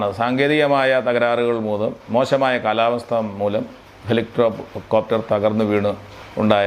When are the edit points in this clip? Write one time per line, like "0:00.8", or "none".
none